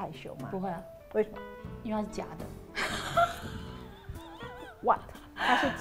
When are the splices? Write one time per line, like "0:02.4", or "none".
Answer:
none